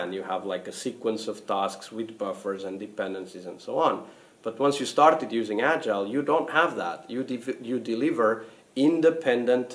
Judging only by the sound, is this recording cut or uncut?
cut